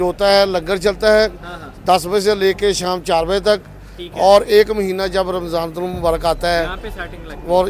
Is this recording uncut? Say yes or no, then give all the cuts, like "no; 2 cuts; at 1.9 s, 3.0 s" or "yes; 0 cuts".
yes; 0 cuts